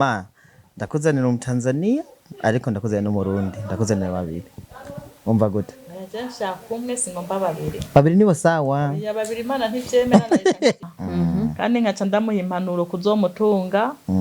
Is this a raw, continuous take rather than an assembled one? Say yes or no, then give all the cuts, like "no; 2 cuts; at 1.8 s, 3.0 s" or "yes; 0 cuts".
no; 1 cut; at 10.8 s